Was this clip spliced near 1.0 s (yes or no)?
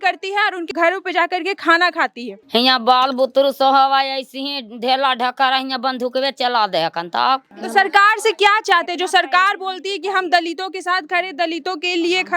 no